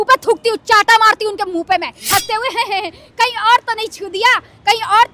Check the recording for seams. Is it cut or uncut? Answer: cut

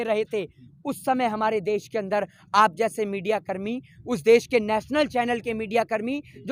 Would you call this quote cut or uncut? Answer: uncut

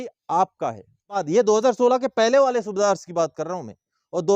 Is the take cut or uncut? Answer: cut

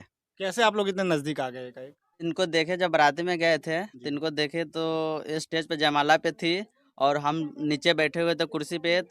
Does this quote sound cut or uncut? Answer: cut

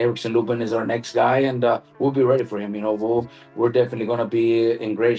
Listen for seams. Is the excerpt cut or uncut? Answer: uncut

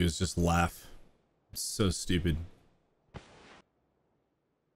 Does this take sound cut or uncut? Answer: cut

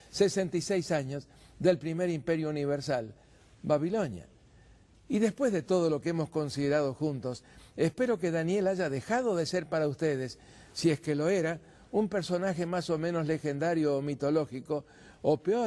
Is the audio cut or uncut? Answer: uncut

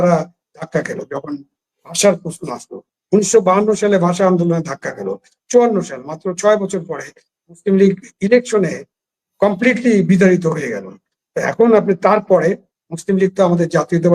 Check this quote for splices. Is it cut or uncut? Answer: uncut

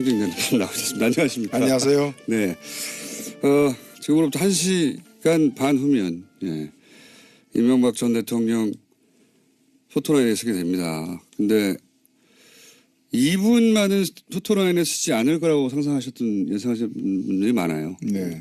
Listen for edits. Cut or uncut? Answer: uncut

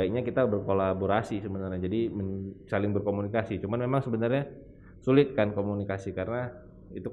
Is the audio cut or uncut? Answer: uncut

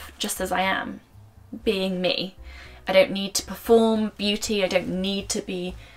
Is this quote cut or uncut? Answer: uncut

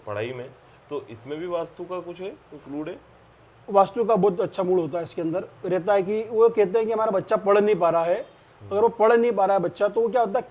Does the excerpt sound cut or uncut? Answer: uncut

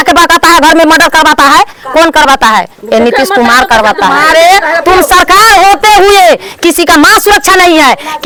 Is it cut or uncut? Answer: uncut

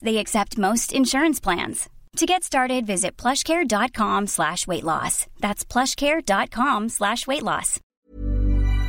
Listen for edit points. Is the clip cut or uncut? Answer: cut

